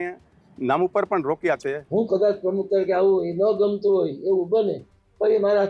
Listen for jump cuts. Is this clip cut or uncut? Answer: cut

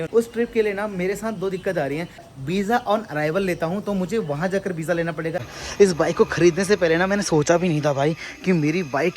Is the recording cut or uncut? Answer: cut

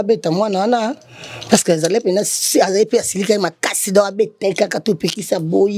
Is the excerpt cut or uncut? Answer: uncut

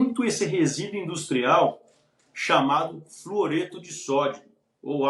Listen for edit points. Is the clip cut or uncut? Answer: uncut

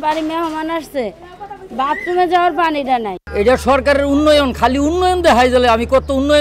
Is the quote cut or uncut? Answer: cut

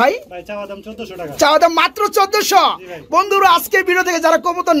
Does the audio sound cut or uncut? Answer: uncut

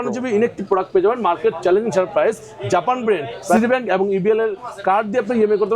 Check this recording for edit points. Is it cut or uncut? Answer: cut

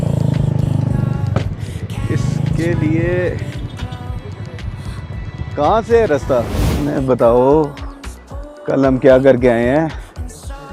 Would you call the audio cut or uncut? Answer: cut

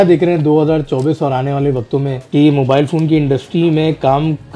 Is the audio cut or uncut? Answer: cut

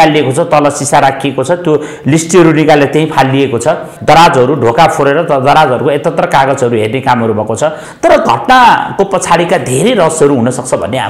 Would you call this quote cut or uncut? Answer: cut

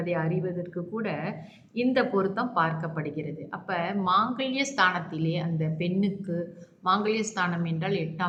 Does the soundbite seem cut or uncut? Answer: uncut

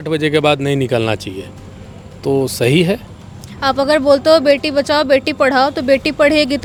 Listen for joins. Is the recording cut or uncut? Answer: uncut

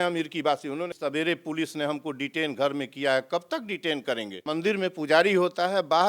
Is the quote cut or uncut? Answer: cut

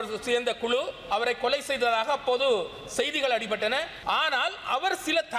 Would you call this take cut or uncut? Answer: cut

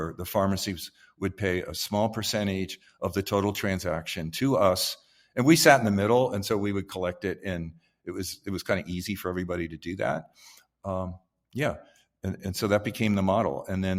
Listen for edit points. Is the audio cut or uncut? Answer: uncut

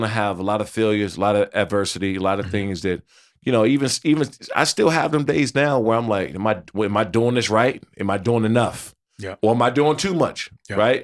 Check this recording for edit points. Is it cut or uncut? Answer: uncut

